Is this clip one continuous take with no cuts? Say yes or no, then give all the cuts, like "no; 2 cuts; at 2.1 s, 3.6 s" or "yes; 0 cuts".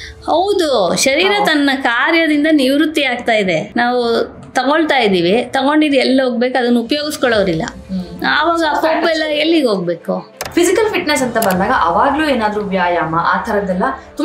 no; 2 cuts; at 3.7 s, 10.4 s